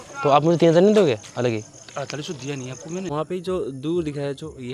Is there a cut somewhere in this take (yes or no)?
yes